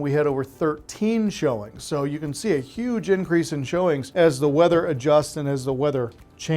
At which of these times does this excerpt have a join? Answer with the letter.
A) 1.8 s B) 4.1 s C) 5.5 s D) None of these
B